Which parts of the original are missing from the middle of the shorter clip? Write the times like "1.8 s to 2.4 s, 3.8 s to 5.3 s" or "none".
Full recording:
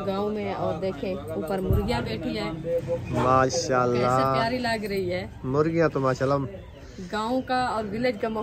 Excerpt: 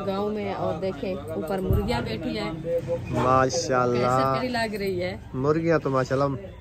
4.4 s to 4.5 s

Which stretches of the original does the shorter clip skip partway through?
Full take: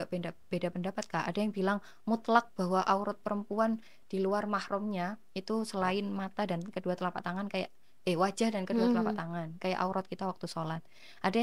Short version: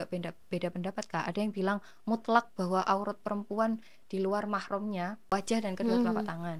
5.3 s to 8.2 s

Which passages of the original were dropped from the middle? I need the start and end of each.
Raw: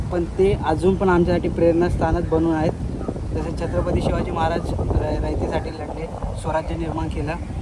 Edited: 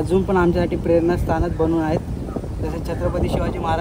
none

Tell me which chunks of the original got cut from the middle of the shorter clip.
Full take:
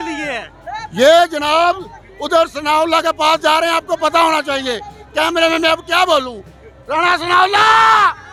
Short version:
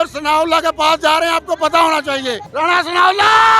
4.8 s to 6.7 s

